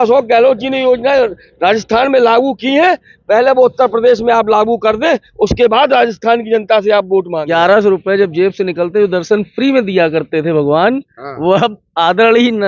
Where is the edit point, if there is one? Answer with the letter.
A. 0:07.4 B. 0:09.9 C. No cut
A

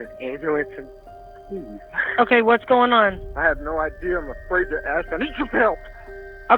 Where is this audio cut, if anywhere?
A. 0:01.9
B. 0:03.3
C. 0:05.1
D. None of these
B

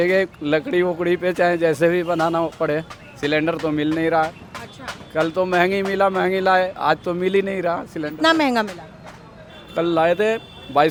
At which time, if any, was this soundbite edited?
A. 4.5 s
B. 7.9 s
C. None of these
C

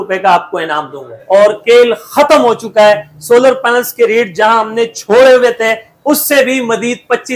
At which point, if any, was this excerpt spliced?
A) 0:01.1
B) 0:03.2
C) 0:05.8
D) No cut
A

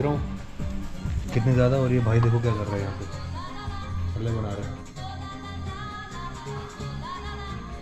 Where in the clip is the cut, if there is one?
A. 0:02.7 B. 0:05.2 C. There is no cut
C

